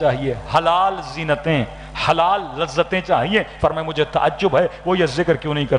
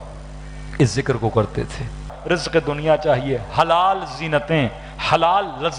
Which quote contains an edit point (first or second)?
second